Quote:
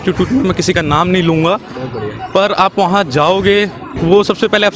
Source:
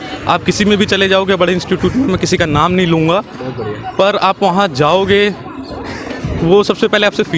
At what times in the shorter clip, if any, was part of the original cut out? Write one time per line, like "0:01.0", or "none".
0:03.9